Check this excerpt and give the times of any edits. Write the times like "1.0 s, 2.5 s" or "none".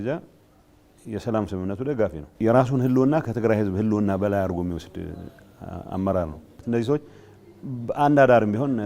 2.2 s, 6.5 s